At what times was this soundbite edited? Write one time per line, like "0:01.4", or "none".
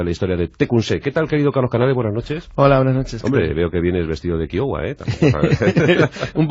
none